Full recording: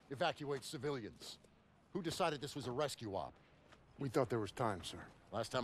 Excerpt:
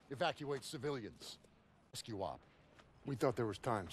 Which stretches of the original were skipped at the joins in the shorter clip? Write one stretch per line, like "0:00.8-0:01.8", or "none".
0:01.9-0:02.9